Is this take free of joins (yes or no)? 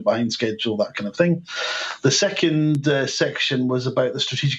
yes